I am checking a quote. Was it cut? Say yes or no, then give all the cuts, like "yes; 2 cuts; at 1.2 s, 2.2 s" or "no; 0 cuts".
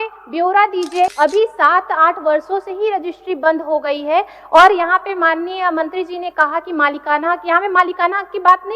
yes; 1 cut; at 1.1 s